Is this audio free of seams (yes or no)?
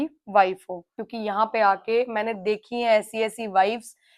no